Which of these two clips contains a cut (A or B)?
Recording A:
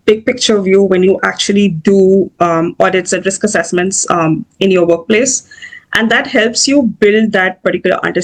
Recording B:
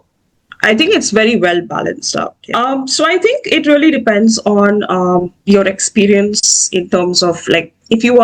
B